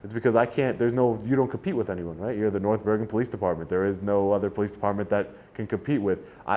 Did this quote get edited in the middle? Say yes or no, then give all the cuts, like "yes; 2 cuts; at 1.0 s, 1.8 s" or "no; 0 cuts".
no; 0 cuts